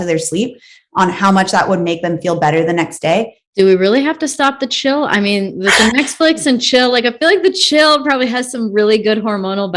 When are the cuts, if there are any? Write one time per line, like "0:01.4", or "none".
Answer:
0:03.4

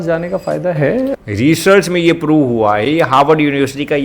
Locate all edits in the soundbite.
0:01.2

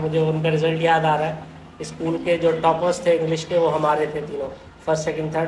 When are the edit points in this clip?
none

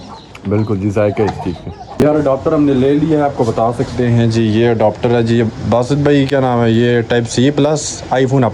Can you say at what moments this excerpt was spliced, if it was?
0:01.8

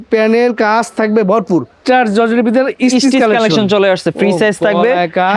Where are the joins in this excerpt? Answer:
0:01.7

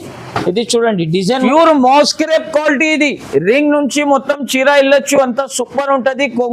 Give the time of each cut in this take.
0:01.5

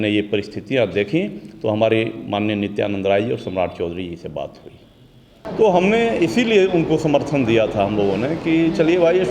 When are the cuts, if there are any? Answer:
0:05.4

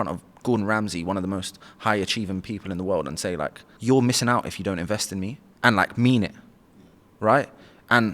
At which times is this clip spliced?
0:03.7
0:05.4

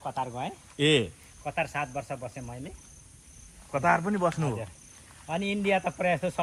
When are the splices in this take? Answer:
none

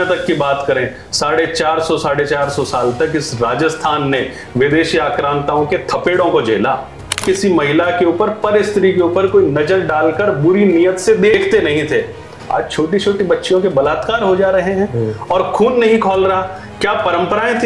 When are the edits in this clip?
0:07.2
0:11.3

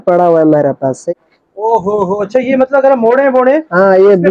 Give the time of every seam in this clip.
0:01.1

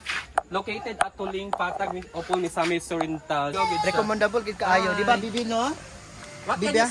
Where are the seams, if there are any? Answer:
0:03.5

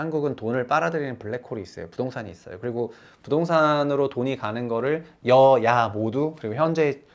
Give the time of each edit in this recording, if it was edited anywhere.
none

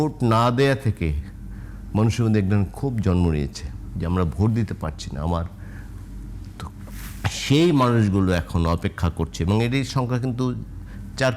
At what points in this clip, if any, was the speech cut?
none

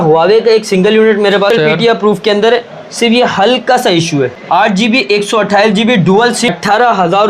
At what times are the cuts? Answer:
0:01.5
0:04.4
0:06.5

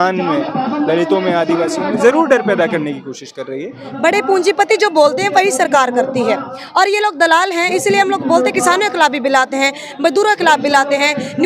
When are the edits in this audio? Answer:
0:03.8

